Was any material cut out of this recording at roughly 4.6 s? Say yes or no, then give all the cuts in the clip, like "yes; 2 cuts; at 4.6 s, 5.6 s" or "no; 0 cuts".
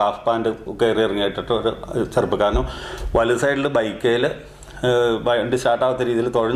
no; 0 cuts